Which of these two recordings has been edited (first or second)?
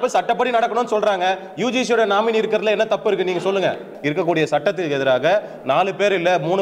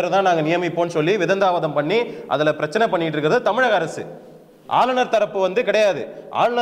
first